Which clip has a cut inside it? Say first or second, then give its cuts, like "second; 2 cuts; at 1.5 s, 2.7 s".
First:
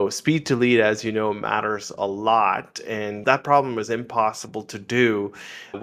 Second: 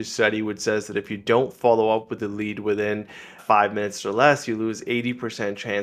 first; 1 cut; at 3.2 s